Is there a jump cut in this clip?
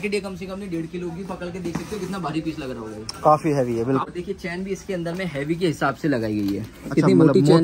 yes; 1 cut; at 4.0 s

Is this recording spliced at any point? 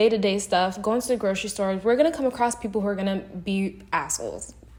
no; 0 cuts

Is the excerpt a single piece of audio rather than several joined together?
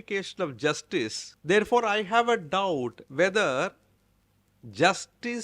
no; 1 cut; at 1.3 s

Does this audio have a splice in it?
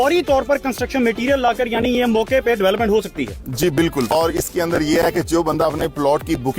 yes; 1 cut; at 4.1 s

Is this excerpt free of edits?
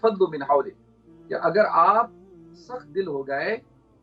yes; 0 cuts

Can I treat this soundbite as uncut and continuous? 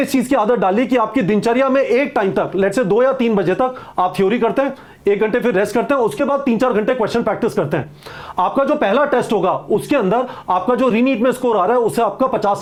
yes; 0 cuts

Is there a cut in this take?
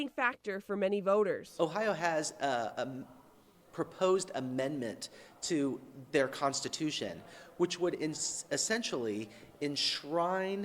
yes; 1 cut; at 1.5 s

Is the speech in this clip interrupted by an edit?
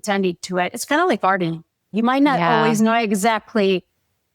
yes; 1 cut; at 1.9 s

